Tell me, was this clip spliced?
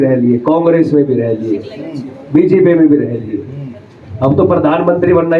no; 0 cuts

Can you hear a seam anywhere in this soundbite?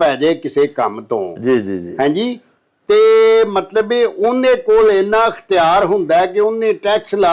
no; 0 cuts

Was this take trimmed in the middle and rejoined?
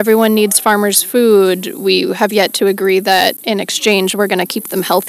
yes; 1 cut; at 3.4 s

